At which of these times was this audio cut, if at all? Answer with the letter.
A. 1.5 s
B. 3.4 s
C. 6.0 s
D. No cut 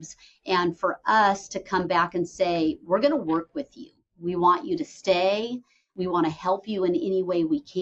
C